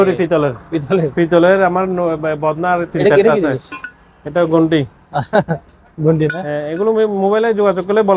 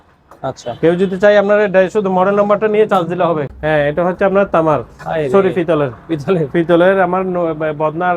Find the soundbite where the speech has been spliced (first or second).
second